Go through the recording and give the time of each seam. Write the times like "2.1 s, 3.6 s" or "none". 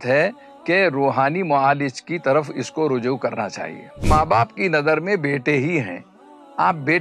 4.0 s